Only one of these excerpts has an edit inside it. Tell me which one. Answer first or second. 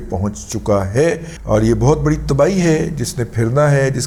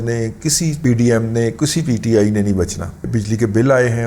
second